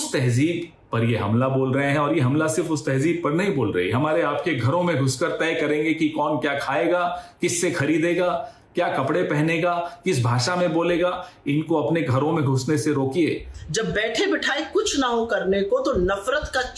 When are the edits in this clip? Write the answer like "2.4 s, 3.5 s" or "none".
13.5 s